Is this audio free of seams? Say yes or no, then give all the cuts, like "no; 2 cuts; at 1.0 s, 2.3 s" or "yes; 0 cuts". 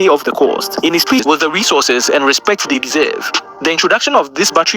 no; 1 cut; at 1.2 s